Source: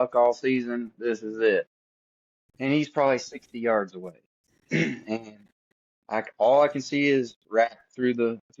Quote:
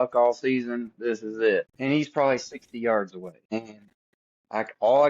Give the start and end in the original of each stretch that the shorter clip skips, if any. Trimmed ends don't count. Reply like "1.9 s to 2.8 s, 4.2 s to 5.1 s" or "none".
1.7 s to 2.5 s, 4.2 s to 5.0 s